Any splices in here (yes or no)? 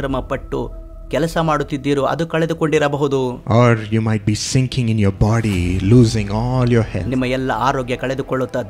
no